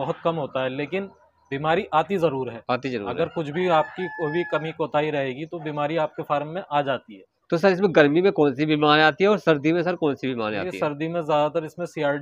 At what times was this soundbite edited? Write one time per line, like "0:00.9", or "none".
none